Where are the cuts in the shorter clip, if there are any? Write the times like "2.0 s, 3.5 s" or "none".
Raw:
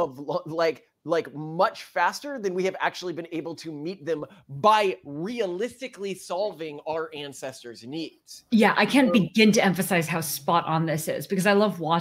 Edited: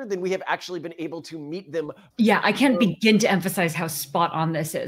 2.0 s